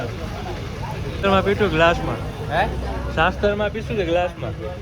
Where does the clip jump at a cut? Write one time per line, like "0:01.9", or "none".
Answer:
0:01.2